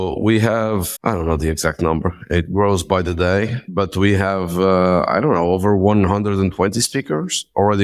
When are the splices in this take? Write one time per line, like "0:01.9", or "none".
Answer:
0:00.9

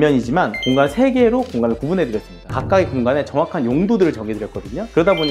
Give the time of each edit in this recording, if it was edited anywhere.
0:02.4

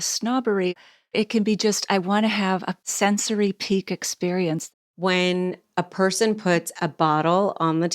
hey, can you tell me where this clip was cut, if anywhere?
0:00.7
0:02.8
0:04.6

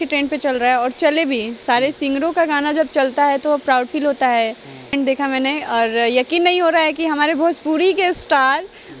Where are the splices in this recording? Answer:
0:04.9

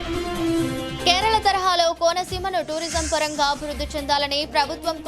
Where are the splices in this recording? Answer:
0:01.0

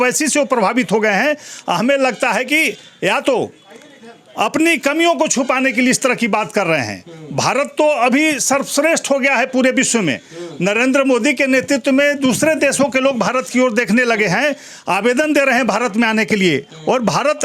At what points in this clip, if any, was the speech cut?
none

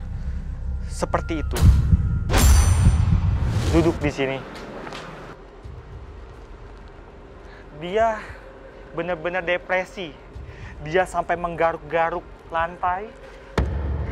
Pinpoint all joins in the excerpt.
0:03.7

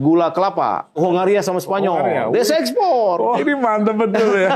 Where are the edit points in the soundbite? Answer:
0:01.0
0:03.4

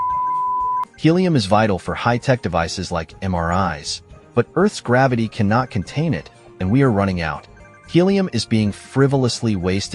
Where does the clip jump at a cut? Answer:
0:00.9

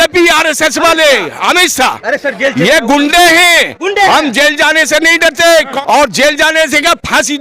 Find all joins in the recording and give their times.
0:05.7

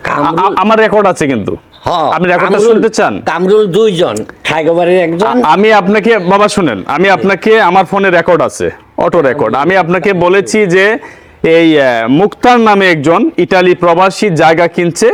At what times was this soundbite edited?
none

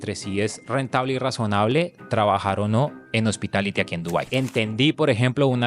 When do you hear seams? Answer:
0:03.9

